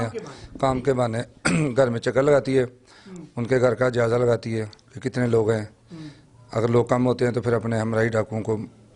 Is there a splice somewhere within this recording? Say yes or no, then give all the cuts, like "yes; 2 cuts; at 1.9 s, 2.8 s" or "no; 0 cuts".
no; 0 cuts